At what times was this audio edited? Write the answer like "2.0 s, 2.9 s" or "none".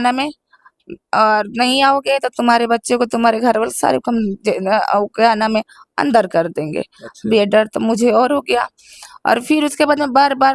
none